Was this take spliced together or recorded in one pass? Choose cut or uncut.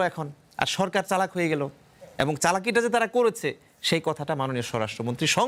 uncut